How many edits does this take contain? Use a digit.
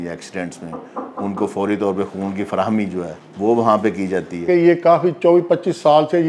2